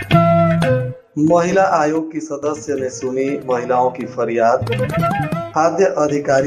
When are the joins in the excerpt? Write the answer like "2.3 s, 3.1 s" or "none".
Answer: 1.0 s